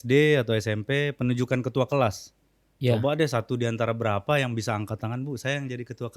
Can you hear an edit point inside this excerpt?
no; 0 cuts

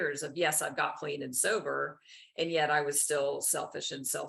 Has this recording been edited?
no; 0 cuts

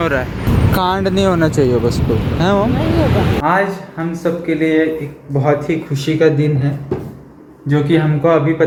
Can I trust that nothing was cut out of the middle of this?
yes; 0 cuts

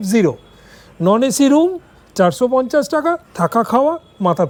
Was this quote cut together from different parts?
no; 0 cuts

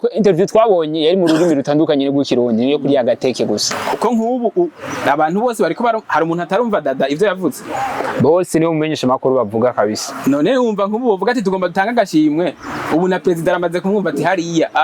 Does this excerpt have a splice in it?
yes; 1 cut; at 3.7 s

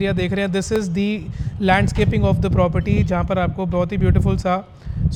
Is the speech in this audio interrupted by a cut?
no; 0 cuts

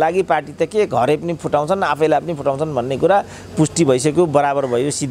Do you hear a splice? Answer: no; 0 cuts

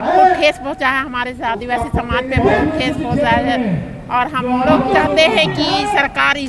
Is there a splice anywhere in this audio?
no; 0 cuts

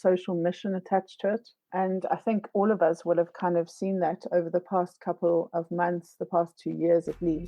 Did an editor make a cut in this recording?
yes; 2 cuts; at 1.6 s, 6.6 s

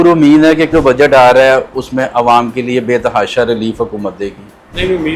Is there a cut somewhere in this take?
no; 0 cuts

